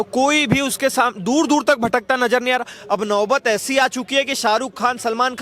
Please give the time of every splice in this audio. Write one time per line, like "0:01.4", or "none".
0:02.8